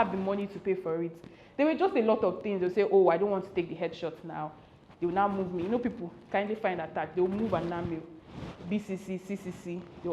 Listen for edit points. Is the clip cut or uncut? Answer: uncut